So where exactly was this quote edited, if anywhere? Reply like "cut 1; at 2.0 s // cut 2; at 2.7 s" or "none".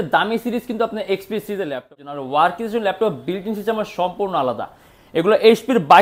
cut 1; at 2.1 s

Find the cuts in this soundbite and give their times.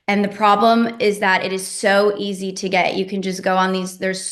none

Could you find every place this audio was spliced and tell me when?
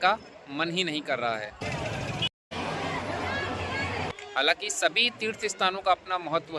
cut 1; at 1.6 s // cut 2; at 4.1 s

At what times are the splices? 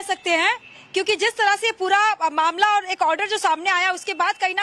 cut 1; at 2.9 s

